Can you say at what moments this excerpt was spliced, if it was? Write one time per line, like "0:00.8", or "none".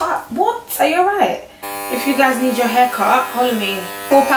0:01.7